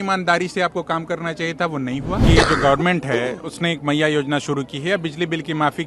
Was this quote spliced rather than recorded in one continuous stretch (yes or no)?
yes